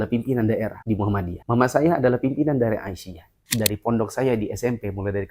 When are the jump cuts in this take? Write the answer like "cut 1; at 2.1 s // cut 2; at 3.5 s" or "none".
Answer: cut 1; at 3.5 s

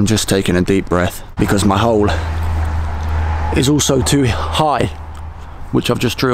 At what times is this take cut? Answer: cut 1; at 1.2 s

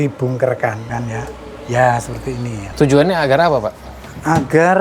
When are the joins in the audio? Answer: cut 1; at 0.9 s // cut 2; at 2.6 s

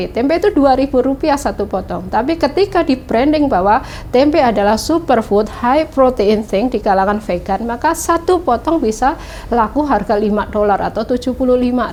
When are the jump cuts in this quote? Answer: none

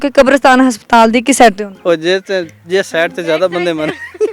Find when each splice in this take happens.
cut 1; at 1.7 s

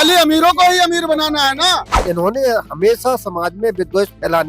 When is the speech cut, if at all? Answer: cut 1; at 2.0 s

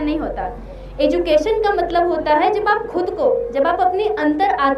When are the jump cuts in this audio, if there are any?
none

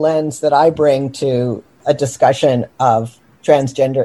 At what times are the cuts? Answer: cut 1; at 1.6 s

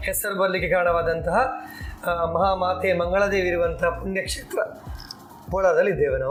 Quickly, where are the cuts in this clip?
none

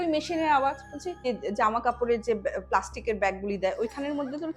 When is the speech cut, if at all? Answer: cut 1; at 1.2 s

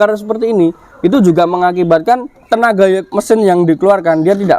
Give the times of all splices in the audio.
cut 1; at 2.3 s // cut 2; at 3.1 s

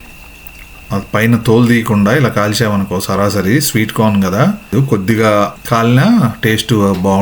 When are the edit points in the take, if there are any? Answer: cut 1; at 4.7 s // cut 2; at 5.6 s

